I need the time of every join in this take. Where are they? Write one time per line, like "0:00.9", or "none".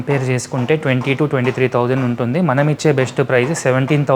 none